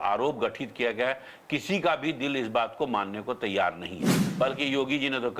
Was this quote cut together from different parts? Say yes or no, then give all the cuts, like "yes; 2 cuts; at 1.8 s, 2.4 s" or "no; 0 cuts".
yes; 1 cut; at 4.2 s